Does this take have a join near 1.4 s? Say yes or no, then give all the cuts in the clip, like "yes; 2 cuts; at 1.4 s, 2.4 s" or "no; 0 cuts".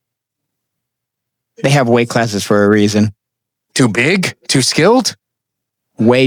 no; 0 cuts